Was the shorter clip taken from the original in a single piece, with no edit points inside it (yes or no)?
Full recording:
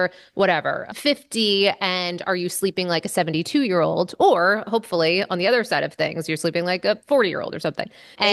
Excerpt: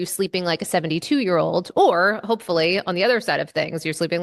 yes